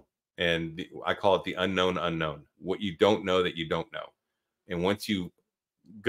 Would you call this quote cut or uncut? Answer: cut